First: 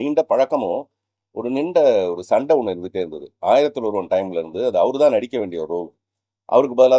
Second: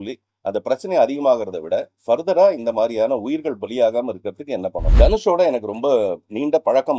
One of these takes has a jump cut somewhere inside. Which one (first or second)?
second